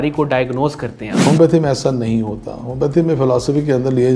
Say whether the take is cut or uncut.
cut